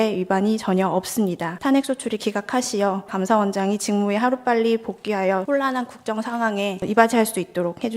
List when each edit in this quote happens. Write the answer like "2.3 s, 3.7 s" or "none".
1.5 s, 3.1 s, 5.4 s, 6.8 s

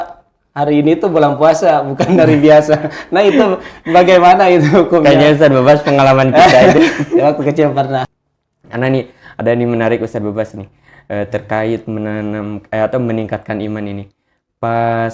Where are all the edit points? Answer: 8.1 s

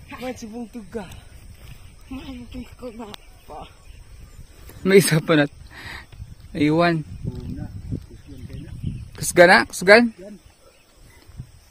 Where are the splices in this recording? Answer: 4.8 s

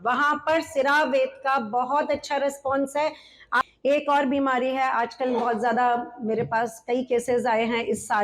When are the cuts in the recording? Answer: 3.7 s

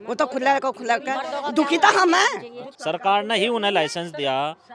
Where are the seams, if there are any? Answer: 2.7 s

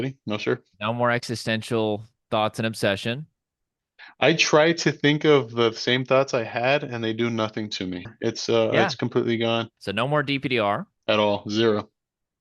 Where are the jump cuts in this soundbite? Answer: 8.1 s, 9.8 s, 10.9 s

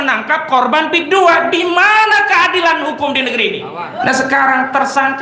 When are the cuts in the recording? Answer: 4.0 s

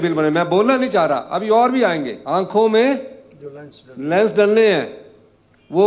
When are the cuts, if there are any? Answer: 2.2 s

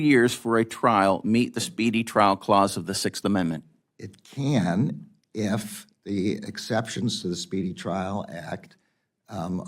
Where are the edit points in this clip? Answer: none

